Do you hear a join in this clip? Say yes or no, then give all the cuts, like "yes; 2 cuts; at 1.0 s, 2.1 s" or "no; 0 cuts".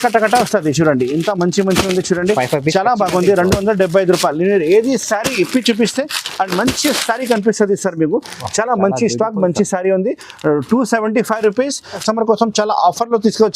yes; 1 cut; at 12.0 s